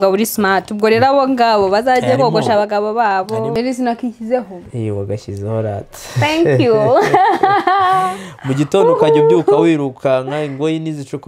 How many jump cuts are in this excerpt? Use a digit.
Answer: 1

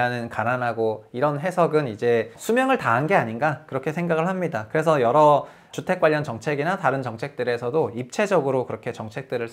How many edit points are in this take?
2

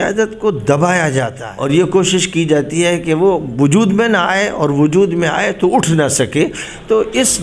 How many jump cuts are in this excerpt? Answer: 1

